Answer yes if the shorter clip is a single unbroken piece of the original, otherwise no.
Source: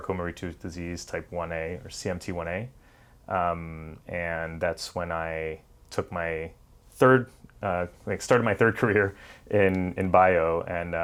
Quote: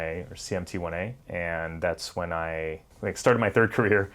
no